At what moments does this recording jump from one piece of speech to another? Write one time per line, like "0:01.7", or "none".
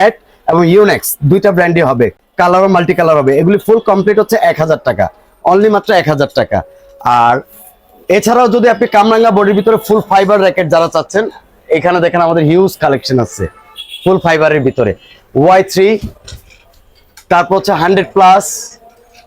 none